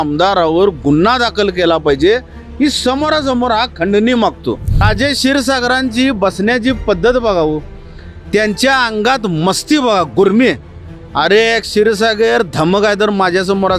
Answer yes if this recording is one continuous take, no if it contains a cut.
no